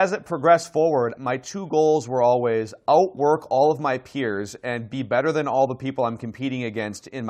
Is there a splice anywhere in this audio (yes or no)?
no